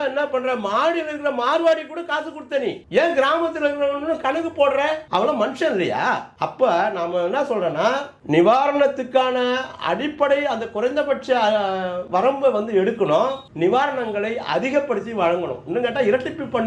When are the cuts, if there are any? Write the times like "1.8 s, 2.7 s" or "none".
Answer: none